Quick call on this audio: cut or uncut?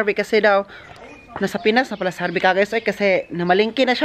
uncut